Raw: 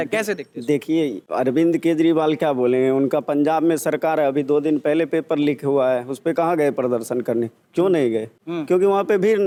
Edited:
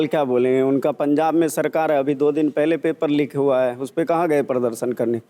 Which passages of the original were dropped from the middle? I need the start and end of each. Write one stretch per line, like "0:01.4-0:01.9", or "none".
none